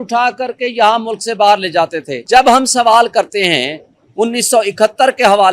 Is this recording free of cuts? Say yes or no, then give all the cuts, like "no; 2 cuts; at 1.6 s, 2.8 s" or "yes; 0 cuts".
no; 1 cut; at 2.2 s